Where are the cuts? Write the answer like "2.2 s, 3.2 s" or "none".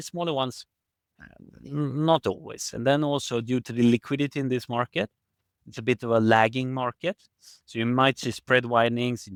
none